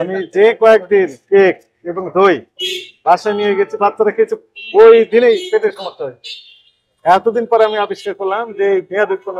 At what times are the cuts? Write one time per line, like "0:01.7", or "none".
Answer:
none